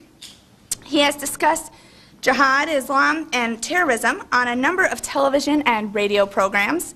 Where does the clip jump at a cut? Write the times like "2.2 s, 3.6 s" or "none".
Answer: none